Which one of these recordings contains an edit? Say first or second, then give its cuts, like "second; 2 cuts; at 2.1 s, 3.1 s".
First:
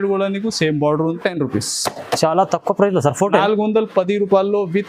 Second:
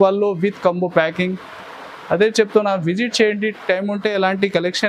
first; 1 cut; at 1.2 s